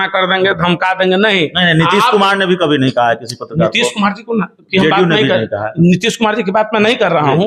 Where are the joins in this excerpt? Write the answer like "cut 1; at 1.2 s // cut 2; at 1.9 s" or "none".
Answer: none